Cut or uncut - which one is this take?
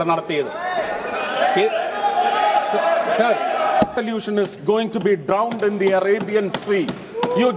cut